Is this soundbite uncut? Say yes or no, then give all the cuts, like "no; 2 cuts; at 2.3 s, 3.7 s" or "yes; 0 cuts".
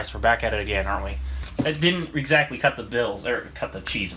no; 1 cut; at 1.4 s